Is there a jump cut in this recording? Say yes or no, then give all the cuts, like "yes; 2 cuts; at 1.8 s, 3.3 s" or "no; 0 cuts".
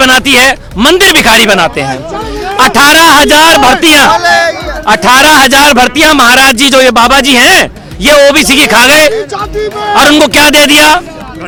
no; 0 cuts